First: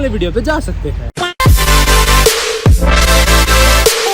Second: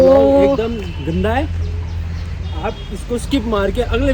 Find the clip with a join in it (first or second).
first